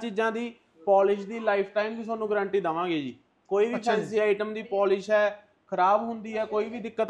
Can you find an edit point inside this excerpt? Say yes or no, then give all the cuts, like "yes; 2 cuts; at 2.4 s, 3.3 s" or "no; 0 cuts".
no; 0 cuts